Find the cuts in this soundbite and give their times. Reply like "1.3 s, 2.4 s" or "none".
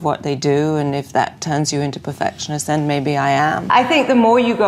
3.7 s